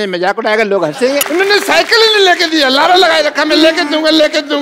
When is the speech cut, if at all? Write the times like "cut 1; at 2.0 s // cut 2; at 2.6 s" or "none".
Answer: cut 1; at 1.3 s